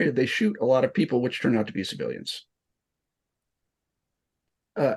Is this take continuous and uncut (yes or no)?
yes